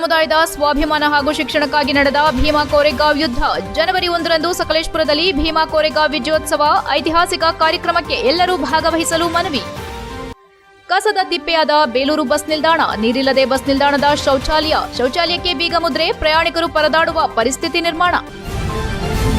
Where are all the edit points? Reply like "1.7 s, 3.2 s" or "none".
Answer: 18.3 s